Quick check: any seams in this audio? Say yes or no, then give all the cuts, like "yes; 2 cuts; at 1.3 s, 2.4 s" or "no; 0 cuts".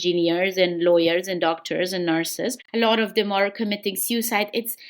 yes; 1 cut; at 2.6 s